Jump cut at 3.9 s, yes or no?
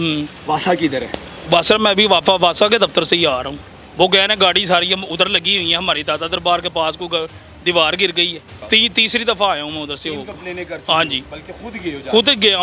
no